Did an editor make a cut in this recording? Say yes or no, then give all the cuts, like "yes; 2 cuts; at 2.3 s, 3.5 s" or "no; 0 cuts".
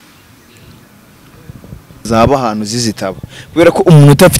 yes; 1 cut; at 2.1 s